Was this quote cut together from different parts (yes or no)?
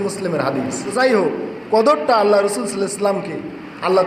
yes